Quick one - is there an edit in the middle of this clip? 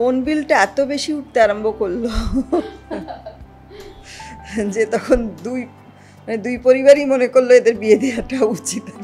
no; 0 cuts

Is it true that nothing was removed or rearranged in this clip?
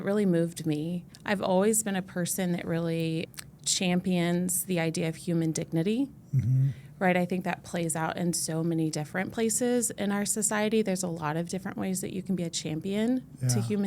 no; 1 cut; at 3.3 s

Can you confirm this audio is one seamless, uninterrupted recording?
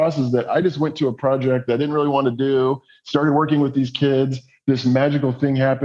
yes; 0 cuts

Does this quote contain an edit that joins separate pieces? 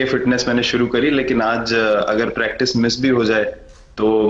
no; 0 cuts

